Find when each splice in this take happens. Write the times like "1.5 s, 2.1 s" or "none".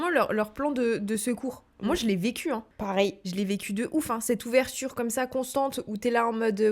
2.9 s